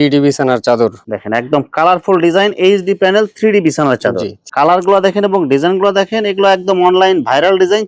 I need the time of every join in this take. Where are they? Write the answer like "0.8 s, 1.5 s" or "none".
1.1 s, 4.3 s